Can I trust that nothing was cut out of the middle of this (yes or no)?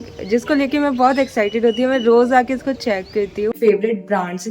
no